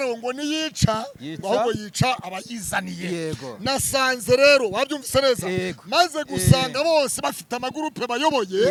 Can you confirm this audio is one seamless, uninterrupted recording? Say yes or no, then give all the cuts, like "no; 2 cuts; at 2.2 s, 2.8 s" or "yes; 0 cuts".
yes; 0 cuts